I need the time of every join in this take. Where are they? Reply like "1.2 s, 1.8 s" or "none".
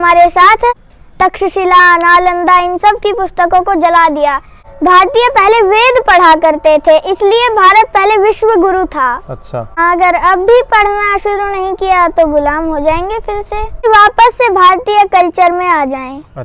0.9 s, 4.8 s, 9.7 s, 13.9 s